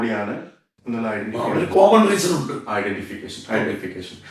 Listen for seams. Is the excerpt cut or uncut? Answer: uncut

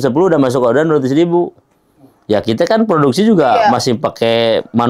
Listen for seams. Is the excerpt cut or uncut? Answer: uncut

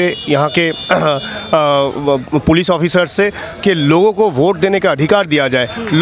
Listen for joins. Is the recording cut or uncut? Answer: uncut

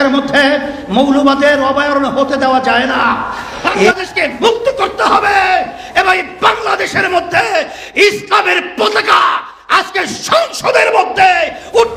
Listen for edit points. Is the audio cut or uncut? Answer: cut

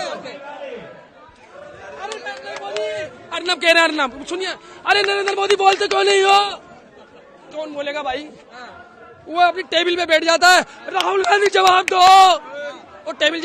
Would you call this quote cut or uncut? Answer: uncut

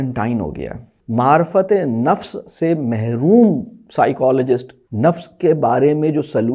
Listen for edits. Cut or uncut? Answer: cut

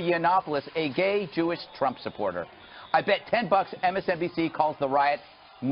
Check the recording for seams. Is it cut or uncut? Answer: cut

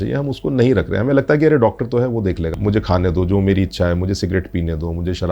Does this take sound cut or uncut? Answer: cut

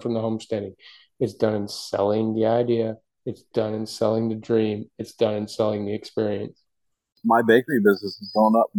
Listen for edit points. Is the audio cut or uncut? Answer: cut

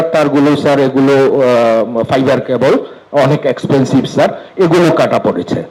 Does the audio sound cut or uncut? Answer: uncut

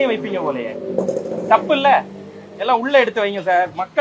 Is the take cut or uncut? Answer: uncut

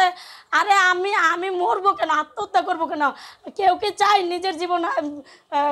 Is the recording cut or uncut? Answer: uncut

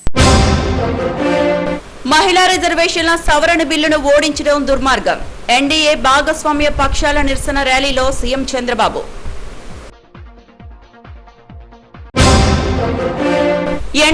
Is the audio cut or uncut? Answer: cut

